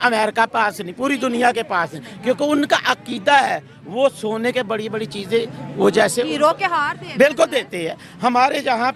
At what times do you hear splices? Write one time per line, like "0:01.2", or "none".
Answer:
none